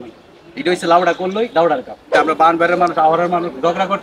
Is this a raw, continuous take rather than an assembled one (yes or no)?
no